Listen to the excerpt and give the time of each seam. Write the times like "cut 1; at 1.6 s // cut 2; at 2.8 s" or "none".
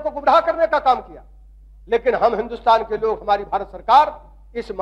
none